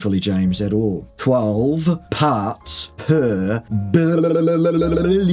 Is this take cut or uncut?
uncut